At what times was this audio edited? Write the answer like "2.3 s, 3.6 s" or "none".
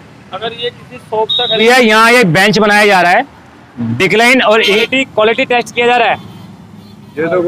1.6 s, 4.8 s